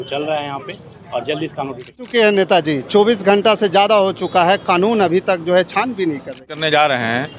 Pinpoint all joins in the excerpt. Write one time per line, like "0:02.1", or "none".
0:02.0
0:06.4